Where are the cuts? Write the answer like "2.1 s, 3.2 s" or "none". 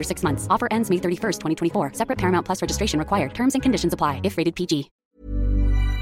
5.0 s